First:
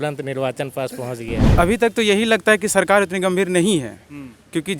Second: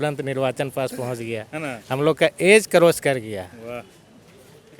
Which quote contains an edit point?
first; 1 cut; at 1.5 s

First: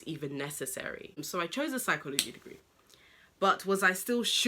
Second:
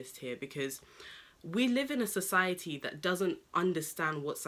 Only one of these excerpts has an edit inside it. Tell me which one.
first; 1 cut; at 1.2 s

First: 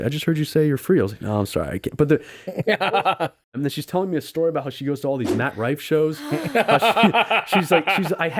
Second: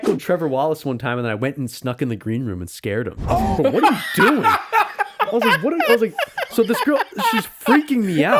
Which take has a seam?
first; 1 cut; at 3.4 s

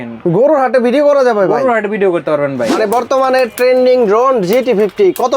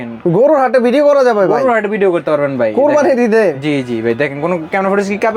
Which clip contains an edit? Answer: first; 1 cut; at 2.7 s

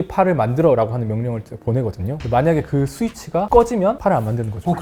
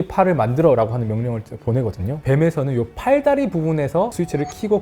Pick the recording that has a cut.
second; 1 cut; at 2.2 s

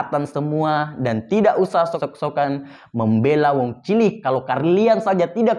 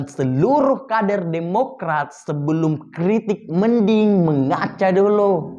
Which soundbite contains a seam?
first; 1 cut; at 2.0 s

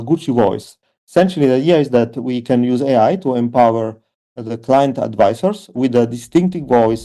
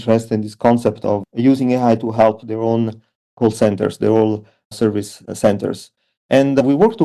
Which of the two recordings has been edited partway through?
second; 1 cut; at 1.3 s

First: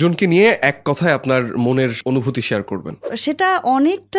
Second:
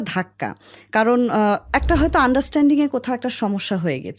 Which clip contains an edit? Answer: first; 2 cuts; at 2.0 s, 3.1 s

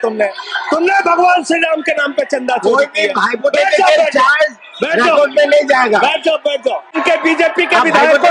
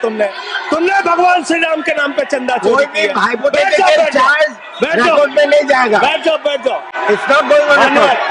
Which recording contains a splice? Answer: first; 1 cut; at 6.9 s

